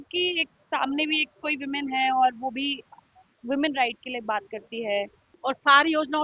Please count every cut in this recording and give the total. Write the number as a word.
one